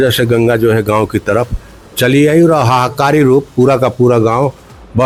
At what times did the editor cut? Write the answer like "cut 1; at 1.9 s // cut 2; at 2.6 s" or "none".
none